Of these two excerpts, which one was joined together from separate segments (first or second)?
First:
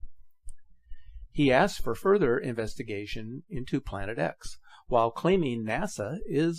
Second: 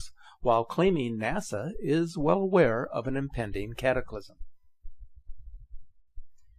first